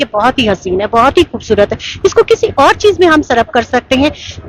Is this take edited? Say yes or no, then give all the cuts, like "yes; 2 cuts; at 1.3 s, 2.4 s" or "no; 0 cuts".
no; 0 cuts